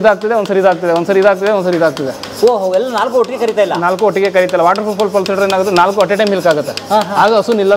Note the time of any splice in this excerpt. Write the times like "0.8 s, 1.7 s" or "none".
none